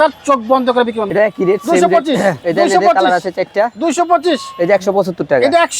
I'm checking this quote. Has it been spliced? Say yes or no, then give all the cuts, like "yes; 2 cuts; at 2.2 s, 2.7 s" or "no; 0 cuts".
yes; 2 cuts; at 1.0 s, 2.4 s